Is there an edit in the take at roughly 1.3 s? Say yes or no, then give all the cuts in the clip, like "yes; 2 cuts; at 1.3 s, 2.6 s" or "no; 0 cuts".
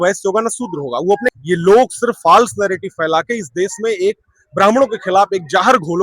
yes; 1 cut; at 1.3 s